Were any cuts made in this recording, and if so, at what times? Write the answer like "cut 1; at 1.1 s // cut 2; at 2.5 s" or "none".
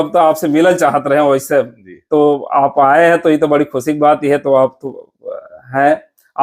none